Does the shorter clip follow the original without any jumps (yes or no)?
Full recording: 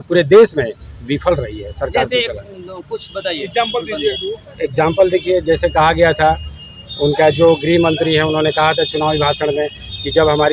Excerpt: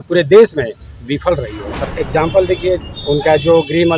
no